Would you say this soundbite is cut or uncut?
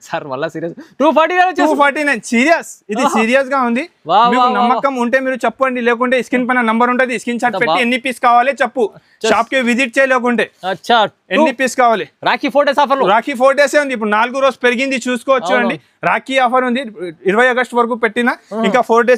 uncut